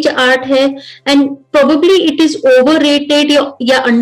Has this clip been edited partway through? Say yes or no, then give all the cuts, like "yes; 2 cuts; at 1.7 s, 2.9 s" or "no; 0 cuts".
no; 0 cuts